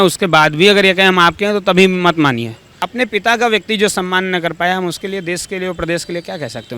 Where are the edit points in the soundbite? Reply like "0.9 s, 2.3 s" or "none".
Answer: 2.7 s